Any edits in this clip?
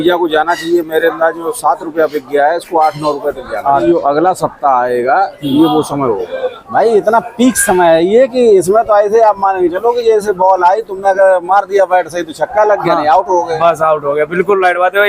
yes; 2 cuts; at 3.8 s, 6.5 s

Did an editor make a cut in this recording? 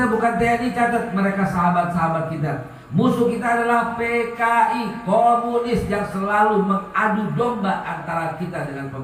no; 0 cuts

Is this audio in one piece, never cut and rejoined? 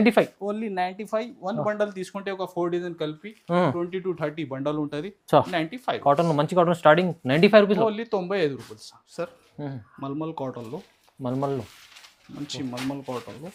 yes; 0 cuts

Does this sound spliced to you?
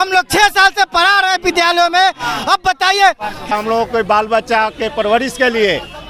yes; 1 cut; at 3.5 s

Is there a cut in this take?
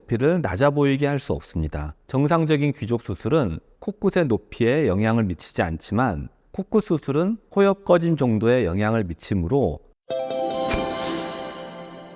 yes; 2 cuts; at 2.0 s, 9.9 s

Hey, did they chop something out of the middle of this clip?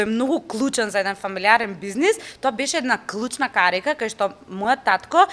no; 0 cuts

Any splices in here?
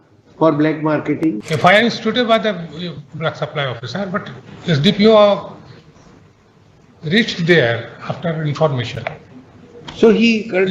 yes; 1 cut; at 1.4 s

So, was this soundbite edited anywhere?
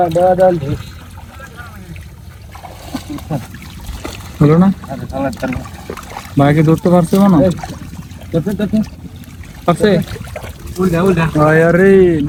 no; 0 cuts

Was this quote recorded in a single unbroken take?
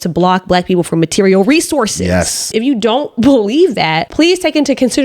no; 2 cuts; at 2.5 s, 4.0 s

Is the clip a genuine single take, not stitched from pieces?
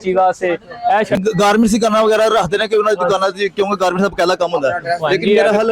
yes; 0 cuts

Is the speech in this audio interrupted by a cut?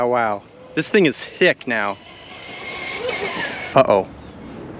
yes; 1 cut; at 3.7 s

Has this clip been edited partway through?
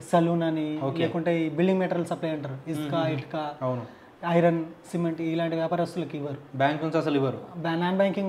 no; 0 cuts

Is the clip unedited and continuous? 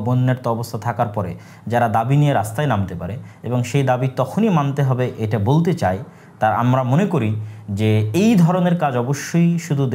yes; 0 cuts

